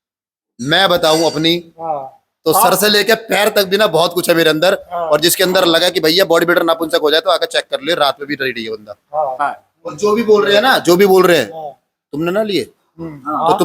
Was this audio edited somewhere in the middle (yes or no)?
yes